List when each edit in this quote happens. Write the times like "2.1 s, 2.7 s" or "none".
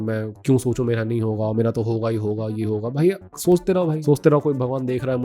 4.0 s